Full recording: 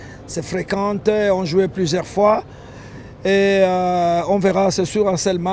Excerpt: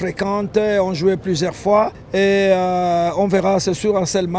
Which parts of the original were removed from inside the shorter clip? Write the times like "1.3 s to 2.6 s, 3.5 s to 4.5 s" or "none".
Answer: 2.5 s to 3.1 s